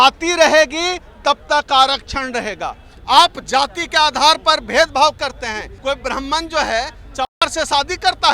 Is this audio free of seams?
no; 2 cuts; at 2.9 s, 5.7 s

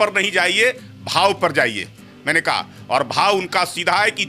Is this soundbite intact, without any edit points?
yes; 0 cuts

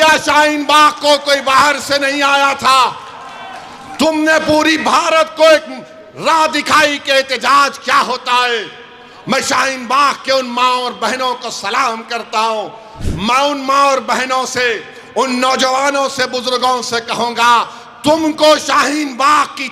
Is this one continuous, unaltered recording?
no; 1 cut; at 12.9 s

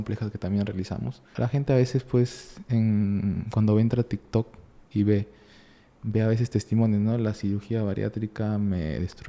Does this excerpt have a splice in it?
yes; 1 cut; at 1.3 s

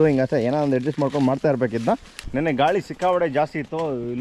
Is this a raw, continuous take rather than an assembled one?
no; 1 cut; at 2.2 s

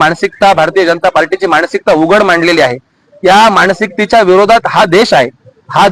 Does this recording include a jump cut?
no; 0 cuts

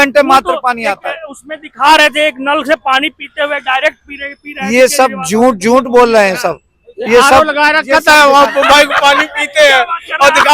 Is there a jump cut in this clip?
no; 0 cuts

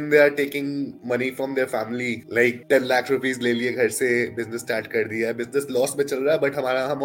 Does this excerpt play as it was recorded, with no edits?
yes; 0 cuts

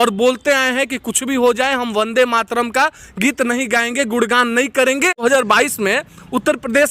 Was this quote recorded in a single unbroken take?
no; 1 cut; at 5.2 s

